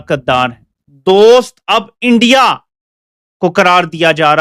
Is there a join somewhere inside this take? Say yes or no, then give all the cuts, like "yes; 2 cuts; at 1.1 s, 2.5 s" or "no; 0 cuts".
no; 0 cuts